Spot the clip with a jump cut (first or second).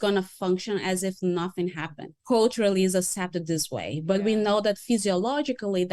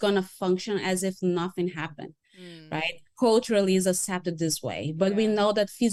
first